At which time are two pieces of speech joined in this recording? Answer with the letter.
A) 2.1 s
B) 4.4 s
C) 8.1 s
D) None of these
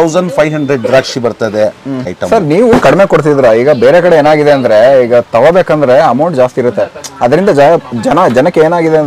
A